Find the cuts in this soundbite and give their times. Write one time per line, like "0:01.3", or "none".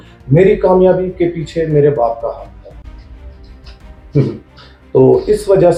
none